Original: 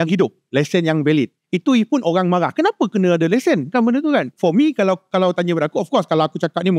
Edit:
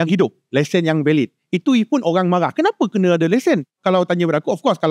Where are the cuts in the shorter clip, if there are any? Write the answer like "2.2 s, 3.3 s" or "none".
3.7 s